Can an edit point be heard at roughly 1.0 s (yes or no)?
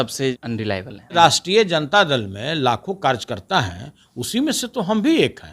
yes